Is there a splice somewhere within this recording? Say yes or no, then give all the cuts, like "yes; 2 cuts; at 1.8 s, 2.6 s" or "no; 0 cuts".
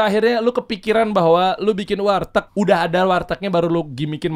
yes; 1 cut; at 2.5 s